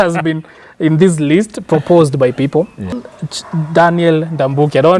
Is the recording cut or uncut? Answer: cut